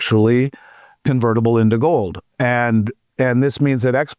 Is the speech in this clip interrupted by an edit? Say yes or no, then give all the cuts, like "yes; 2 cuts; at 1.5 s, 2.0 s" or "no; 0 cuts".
no; 0 cuts